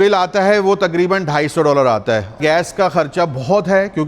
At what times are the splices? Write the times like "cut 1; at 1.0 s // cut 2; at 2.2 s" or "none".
cut 1; at 2.4 s

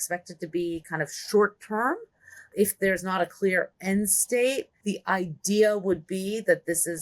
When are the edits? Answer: cut 1; at 2.5 s // cut 2; at 4.7 s

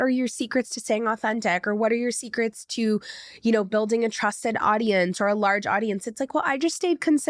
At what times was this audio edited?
none

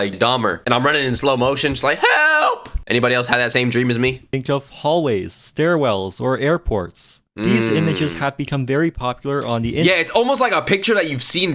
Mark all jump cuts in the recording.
none

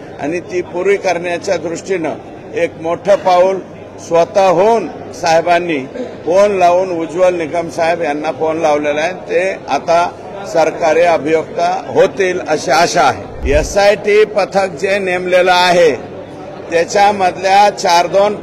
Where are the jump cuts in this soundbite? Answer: cut 1; at 13.3 s

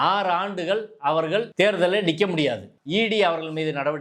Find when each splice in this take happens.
cut 1; at 1.5 s // cut 2; at 2.7 s

